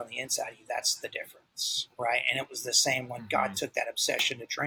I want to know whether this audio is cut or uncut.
uncut